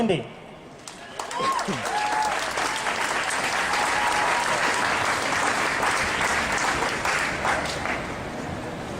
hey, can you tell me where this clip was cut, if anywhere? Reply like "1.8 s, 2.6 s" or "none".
4.7 s